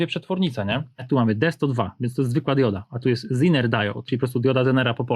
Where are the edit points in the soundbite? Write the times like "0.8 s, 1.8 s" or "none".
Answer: 1.0 s, 4.1 s